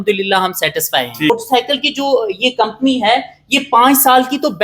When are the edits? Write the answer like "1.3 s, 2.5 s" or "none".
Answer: 1.3 s